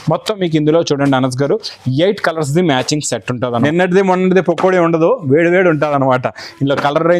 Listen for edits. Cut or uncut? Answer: cut